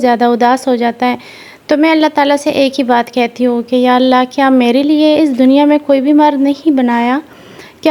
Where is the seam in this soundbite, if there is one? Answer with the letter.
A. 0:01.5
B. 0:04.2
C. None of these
C